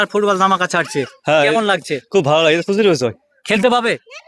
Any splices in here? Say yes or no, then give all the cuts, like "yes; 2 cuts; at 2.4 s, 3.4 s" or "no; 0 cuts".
no; 0 cuts